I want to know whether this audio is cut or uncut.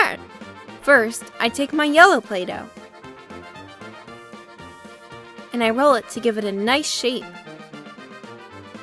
cut